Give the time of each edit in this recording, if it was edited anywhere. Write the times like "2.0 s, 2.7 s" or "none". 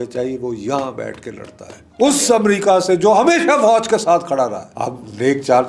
1.8 s, 4.7 s